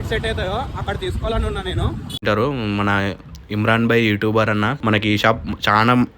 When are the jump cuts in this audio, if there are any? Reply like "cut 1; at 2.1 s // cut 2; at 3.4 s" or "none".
cut 1; at 2.2 s